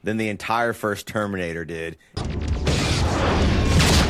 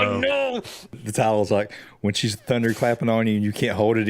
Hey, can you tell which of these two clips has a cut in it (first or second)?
second